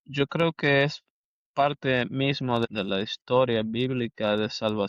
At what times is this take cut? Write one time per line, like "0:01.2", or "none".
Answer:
0:02.6